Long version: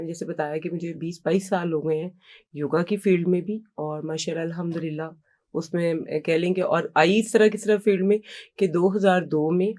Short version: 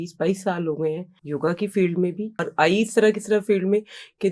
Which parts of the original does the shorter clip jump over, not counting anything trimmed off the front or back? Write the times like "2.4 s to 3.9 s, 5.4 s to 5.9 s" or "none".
2.2 s to 2.4 s, 3.8 s to 6.8 s